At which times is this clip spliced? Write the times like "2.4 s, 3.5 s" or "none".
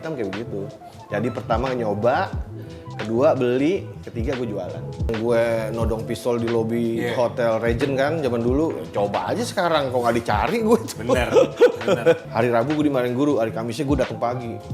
5.1 s, 12.2 s

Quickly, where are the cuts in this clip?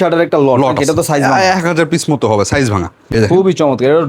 3.1 s

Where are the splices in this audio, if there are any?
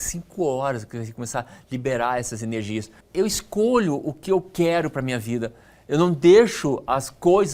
3.0 s

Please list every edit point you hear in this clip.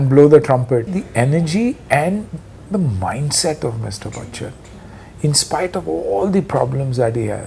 1.0 s, 2.6 s

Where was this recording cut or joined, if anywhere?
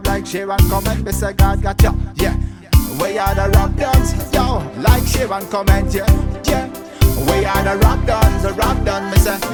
none

